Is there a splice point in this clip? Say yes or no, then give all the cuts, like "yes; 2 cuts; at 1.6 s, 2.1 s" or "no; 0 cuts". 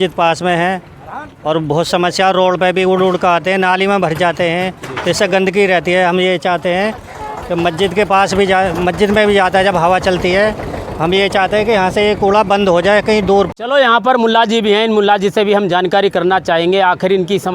yes; 1 cut; at 13.5 s